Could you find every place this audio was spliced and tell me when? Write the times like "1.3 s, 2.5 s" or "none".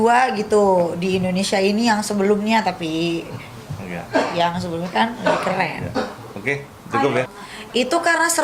7.4 s